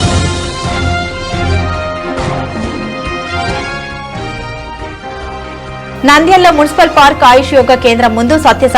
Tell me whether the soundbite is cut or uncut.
cut